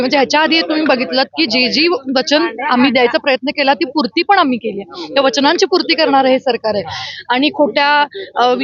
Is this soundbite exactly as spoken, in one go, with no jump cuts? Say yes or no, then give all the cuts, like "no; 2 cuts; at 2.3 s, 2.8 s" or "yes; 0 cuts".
yes; 0 cuts